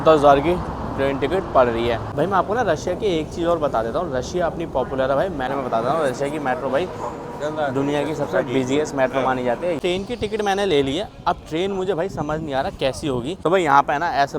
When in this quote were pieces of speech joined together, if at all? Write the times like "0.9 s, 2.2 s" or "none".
2.1 s, 5.5 s, 9.8 s, 13.4 s